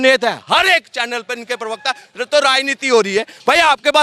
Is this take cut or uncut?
uncut